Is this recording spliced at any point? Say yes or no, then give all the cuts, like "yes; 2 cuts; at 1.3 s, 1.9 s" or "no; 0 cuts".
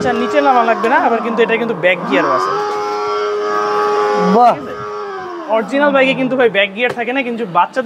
no; 0 cuts